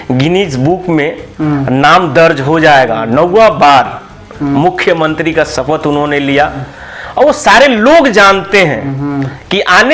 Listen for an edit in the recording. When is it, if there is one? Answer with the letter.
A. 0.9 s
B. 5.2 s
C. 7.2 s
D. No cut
D